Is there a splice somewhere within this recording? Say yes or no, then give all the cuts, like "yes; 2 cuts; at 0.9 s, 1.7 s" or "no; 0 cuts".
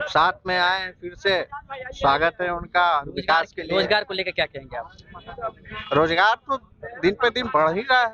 no; 0 cuts